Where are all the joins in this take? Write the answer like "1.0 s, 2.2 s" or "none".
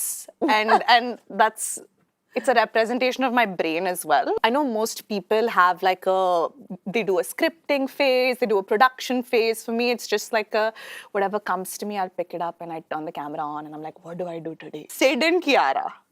4.4 s, 14.8 s